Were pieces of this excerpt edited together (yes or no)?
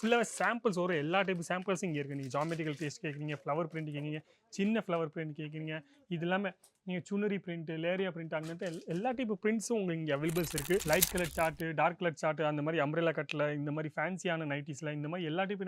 yes